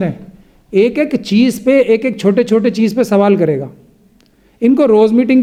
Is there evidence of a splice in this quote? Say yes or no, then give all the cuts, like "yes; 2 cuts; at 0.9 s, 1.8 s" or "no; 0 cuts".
no; 0 cuts